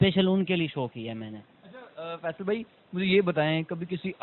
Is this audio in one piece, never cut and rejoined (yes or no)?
yes